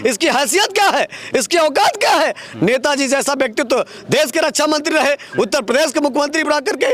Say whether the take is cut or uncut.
uncut